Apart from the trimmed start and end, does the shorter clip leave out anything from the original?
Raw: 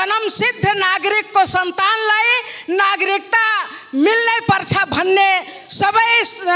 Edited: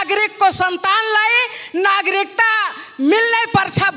no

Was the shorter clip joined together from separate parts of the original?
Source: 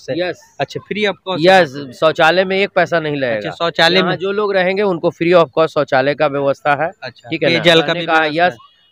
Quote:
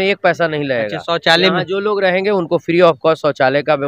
no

